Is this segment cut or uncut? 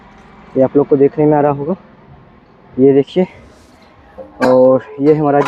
uncut